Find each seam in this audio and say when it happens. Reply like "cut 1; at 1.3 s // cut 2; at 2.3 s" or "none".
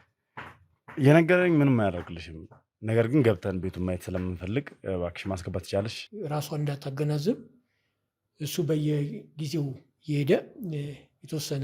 cut 1; at 6.0 s